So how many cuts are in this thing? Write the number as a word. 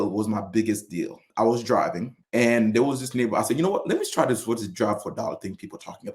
two